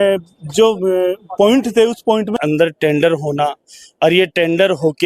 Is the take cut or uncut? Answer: cut